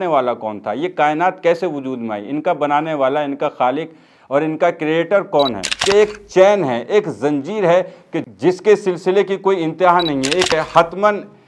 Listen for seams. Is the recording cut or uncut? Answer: cut